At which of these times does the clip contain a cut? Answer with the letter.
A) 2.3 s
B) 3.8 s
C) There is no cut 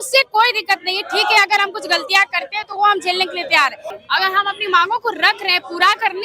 B